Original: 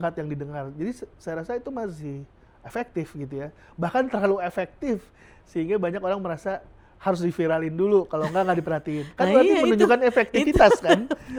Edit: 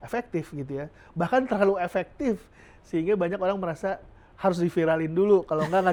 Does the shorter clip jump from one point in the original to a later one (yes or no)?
no